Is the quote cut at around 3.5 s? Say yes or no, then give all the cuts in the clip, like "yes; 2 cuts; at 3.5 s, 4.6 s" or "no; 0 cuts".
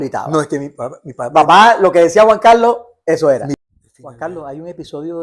yes; 1 cut; at 3.5 s